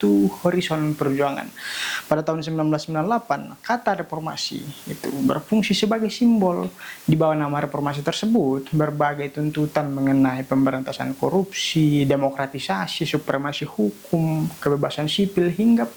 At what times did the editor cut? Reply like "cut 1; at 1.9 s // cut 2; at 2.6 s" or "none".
none